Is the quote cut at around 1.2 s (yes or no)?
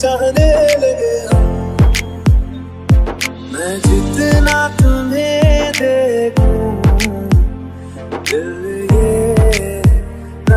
yes